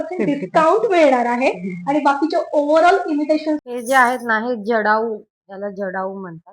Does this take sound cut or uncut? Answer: cut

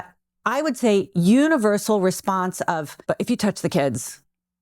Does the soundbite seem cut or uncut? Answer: cut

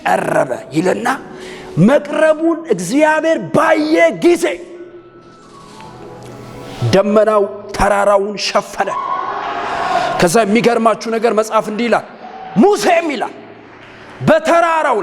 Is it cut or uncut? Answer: uncut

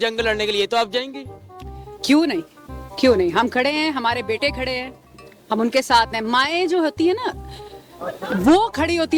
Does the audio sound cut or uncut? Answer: uncut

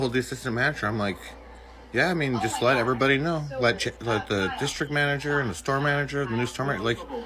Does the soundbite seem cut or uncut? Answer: cut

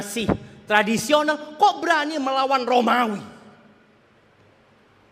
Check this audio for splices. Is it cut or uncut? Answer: uncut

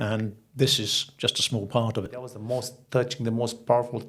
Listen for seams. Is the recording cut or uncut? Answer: cut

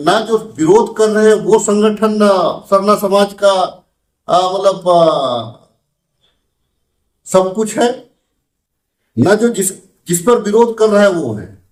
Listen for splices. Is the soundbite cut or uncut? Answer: uncut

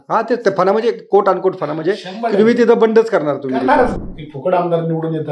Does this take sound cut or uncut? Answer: cut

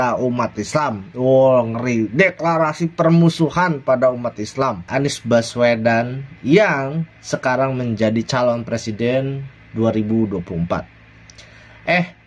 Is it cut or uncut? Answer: cut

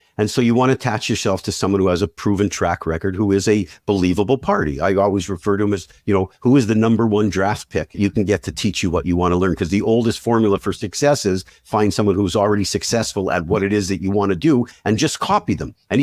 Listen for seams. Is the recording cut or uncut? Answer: uncut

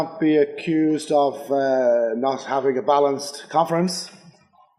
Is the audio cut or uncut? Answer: uncut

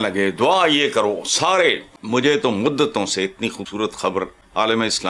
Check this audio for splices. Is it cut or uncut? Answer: cut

